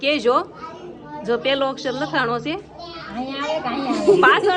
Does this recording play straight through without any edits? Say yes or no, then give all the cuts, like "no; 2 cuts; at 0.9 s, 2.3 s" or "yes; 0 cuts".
yes; 0 cuts